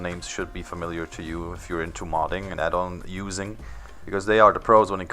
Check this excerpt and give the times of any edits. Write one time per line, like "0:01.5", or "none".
0:01.0